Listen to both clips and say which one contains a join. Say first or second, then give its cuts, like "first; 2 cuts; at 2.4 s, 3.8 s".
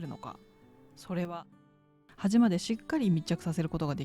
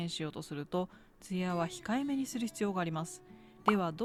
first; 1 cut; at 1.9 s